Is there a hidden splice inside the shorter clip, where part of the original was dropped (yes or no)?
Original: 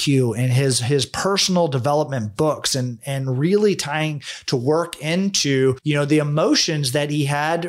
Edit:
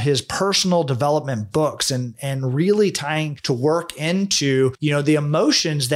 yes